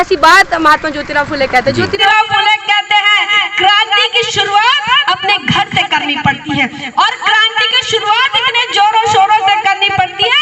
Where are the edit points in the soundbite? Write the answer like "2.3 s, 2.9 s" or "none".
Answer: 2.0 s